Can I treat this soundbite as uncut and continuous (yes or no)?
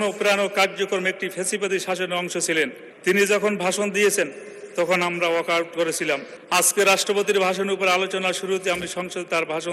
no